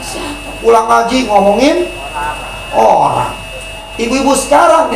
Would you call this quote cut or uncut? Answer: cut